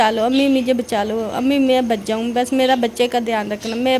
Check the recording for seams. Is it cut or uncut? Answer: uncut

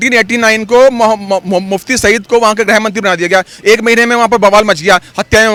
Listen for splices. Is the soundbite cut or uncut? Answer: uncut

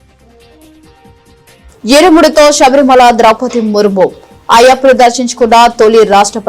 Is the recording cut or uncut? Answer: uncut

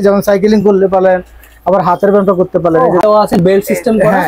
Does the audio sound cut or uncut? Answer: cut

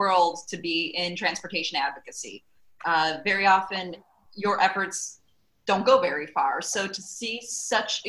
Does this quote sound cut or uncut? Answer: uncut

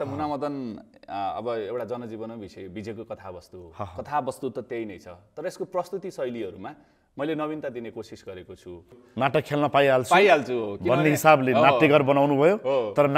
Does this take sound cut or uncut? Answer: cut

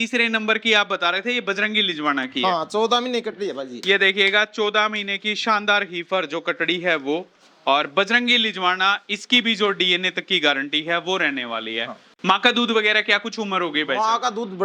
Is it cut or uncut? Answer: uncut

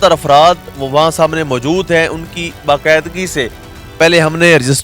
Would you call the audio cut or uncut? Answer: uncut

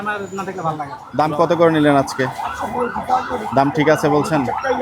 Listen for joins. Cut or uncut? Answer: cut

